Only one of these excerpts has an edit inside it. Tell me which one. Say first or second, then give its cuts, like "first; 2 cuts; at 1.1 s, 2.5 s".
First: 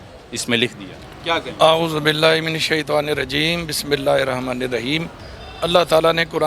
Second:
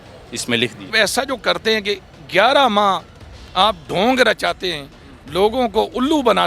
second; 1 cut; at 0.9 s